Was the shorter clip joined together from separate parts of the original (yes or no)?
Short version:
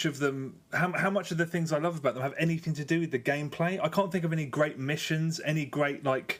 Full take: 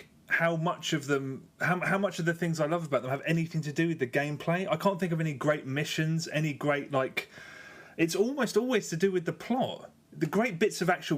no